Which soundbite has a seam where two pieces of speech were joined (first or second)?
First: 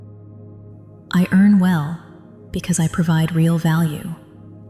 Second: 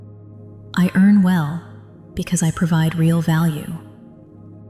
second